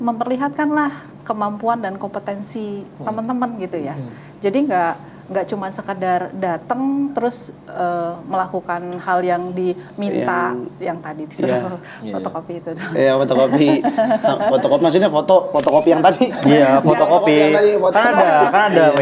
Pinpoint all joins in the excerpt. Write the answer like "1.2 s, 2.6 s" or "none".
none